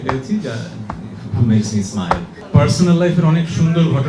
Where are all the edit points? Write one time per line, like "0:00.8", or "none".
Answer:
0:02.3